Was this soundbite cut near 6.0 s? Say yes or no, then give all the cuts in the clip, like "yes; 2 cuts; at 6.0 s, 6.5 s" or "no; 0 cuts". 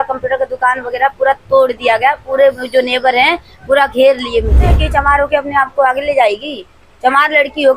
no; 1 cut; at 4.7 s